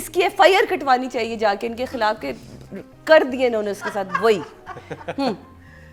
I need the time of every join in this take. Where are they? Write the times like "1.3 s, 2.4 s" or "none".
none